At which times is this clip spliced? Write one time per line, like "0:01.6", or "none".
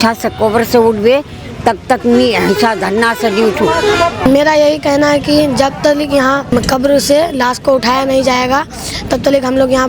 0:04.3
0:06.5